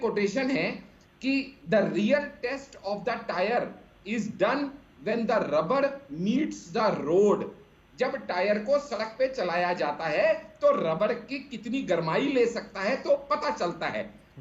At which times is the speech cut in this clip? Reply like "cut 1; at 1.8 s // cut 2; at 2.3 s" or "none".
none